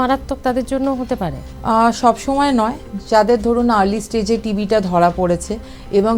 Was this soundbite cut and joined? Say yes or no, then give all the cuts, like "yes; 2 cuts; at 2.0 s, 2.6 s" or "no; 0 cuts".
no; 0 cuts